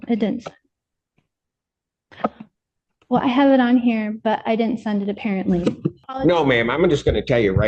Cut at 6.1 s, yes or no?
yes